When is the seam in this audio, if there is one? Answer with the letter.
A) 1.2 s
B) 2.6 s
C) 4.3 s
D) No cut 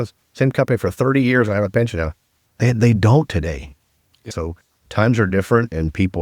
C